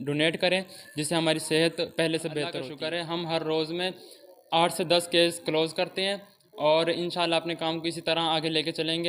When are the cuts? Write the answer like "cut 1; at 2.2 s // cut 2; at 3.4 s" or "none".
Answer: cut 1; at 2.6 s